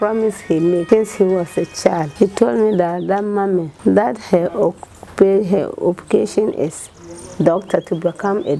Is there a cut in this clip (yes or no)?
yes